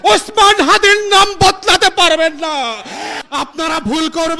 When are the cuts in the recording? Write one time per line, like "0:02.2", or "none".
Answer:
0:03.1